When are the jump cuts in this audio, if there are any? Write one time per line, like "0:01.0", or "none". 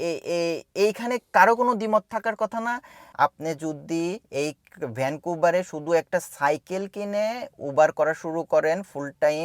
0:03.0